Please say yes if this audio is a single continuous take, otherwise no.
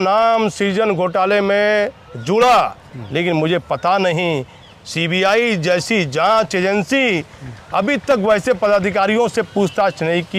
yes